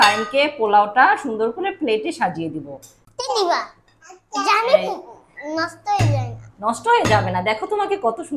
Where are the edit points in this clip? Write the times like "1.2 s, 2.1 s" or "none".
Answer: 3.0 s